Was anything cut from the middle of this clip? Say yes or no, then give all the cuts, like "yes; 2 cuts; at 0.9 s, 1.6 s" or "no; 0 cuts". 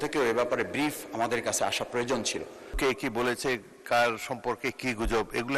yes; 1 cut; at 2.7 s